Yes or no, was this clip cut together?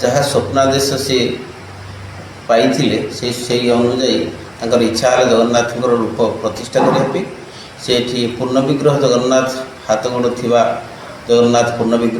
no